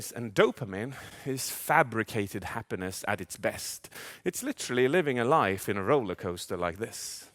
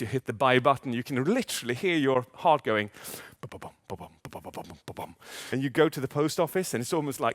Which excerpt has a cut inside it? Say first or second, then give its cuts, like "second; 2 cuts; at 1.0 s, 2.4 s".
second; 1 cut; at 5.5 s